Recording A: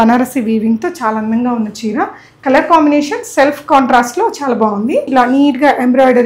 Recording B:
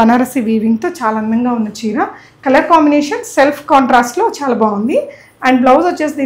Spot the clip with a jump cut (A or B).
A